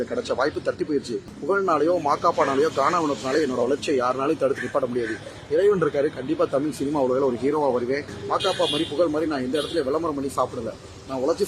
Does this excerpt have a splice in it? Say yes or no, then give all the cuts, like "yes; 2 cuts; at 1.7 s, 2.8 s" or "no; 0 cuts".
yes; 2 cuts; at 1.3 s, 8.1 s